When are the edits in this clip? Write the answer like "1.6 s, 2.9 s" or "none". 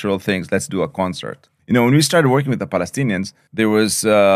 1.5 s, 3.4 s